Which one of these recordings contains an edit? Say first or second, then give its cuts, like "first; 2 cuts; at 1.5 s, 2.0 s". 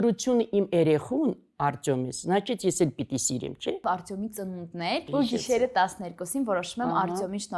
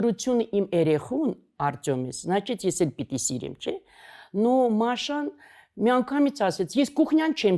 first; 2 cuts; at 3.8 s, 5.1 s